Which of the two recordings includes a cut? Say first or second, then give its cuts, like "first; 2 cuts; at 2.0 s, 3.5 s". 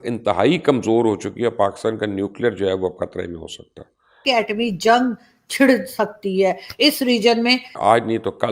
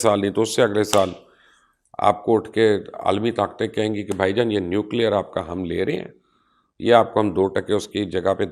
first; 2 cuts; at 4.2 s, 7.7 s